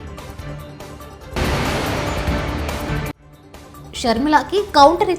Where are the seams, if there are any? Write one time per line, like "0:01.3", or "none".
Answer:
0:01.3
0:03.2